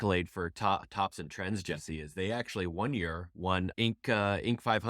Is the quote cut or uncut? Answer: cut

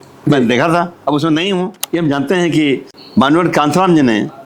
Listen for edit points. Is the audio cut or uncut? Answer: cut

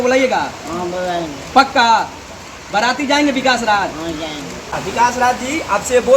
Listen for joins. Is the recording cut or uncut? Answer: cut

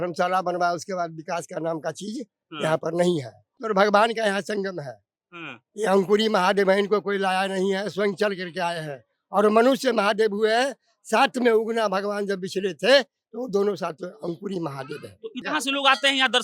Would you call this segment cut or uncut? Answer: cut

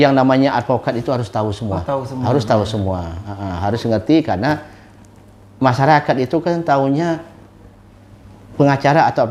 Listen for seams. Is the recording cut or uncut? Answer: uncut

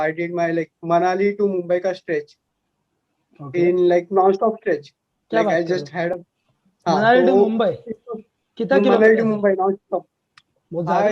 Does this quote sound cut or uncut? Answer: uncut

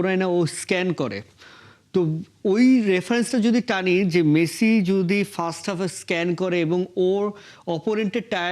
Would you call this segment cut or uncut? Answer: uncut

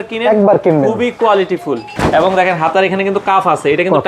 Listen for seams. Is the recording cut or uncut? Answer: cut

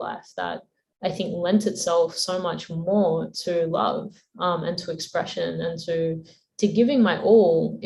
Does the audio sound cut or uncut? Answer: uncut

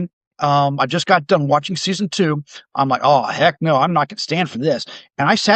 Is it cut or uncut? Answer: uncut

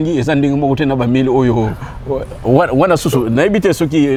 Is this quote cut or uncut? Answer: uncut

